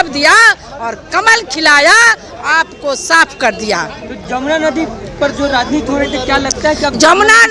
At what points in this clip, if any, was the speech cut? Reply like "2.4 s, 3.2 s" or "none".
none